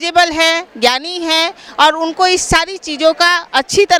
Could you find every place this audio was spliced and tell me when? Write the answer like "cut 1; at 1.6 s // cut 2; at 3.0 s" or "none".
none